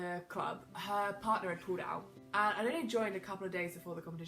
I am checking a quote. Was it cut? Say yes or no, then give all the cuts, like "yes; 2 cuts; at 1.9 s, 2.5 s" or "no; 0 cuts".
yes; 1 cut; at 2.1 s